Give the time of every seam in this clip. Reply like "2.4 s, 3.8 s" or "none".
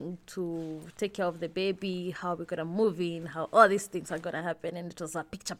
none